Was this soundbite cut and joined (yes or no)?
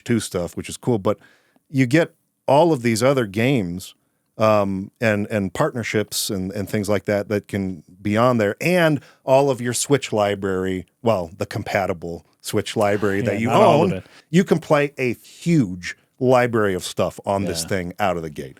yes